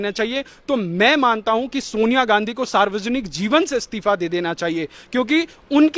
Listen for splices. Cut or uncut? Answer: uncut